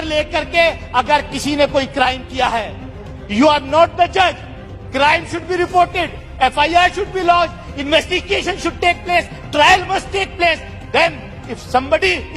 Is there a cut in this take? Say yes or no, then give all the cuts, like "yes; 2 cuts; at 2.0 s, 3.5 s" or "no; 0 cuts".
no; 0 cuts